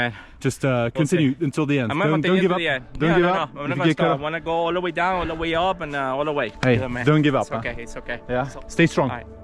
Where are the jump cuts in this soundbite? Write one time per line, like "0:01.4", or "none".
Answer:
0:06.5
0:08.5